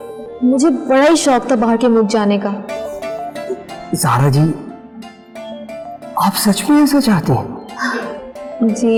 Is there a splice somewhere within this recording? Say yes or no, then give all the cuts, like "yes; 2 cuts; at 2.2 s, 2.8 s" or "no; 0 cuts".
no; 0 cuts